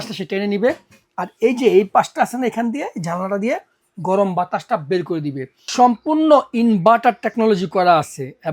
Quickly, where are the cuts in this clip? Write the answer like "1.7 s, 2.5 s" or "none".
5.6 s